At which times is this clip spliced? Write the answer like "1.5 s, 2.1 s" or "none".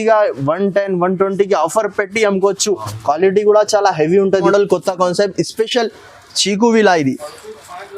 4.5 s